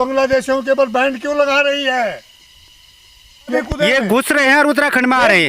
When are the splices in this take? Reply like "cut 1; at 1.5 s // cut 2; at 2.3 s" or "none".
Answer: cut 1; at 3.5 s